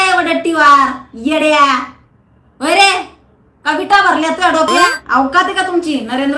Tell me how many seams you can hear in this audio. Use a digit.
1